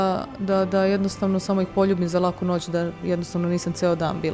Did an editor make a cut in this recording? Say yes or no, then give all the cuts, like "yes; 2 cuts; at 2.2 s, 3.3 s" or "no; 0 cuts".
no; 0 cuts